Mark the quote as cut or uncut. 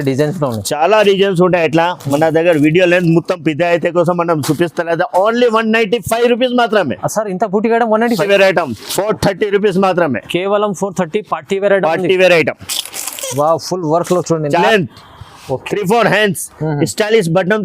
cut